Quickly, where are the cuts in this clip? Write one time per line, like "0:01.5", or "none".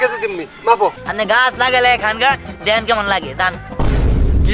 0:01.0